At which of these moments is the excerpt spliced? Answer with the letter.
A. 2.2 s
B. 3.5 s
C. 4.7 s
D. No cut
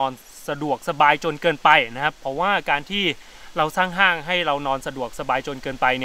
D